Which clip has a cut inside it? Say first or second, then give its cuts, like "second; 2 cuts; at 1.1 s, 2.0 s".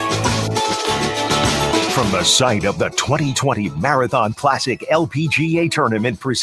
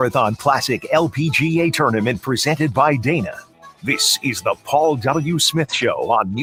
first; 1 cut; at 1.9 s